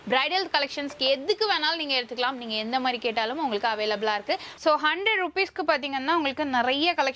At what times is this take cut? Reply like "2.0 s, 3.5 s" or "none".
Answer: 4.5 s